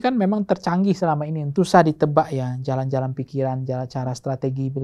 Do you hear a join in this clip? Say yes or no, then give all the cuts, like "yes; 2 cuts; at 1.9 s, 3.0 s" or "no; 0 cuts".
yes; 1 cut; at 1.5 s